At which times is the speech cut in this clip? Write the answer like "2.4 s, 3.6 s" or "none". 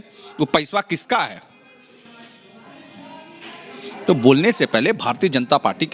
none

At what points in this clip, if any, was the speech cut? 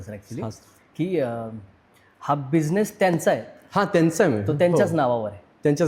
none

